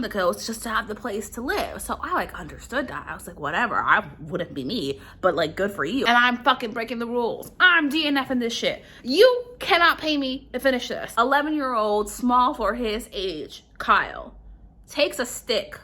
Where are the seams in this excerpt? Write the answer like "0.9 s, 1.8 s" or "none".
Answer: 6.1 s, 11.0 s